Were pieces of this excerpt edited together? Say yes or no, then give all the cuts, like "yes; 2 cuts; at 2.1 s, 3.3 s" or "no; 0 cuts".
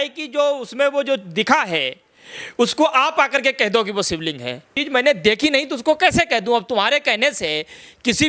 yes; 1 cut; at 4.8 s